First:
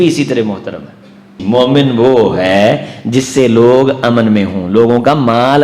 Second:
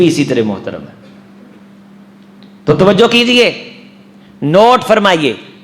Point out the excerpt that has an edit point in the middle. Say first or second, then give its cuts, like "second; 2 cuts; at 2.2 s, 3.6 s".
first; 1 cut; at 1.4 s